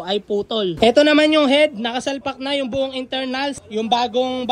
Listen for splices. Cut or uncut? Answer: cut